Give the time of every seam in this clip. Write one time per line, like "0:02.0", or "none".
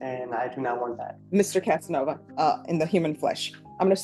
0:01.1
0:02.2